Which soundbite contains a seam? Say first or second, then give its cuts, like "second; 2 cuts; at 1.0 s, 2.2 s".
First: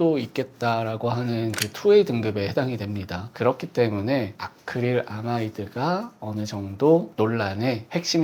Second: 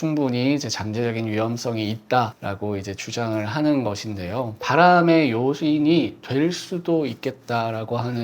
second; 1 cut; at 4.6 s